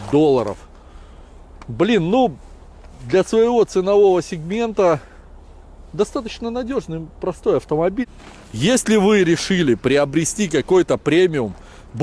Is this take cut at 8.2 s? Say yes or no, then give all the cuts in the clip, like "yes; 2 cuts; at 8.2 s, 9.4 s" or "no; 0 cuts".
yes; 1 cut; at 8.2 s